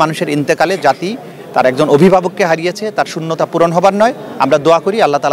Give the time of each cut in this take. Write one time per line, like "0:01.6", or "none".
none